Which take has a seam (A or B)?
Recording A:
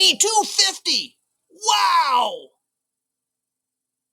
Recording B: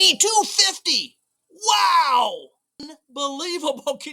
B